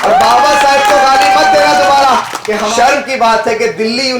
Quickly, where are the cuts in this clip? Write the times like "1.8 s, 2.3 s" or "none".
2.6 s